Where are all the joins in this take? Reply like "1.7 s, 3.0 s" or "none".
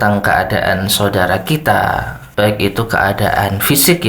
2.2 s